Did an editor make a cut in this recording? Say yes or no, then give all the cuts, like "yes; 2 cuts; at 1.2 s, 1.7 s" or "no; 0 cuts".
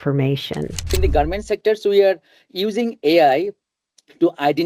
yes; 1 cut; at 1.0 s